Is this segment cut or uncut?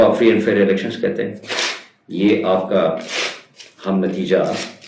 uncut